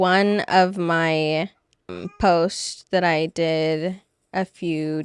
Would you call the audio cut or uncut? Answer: cut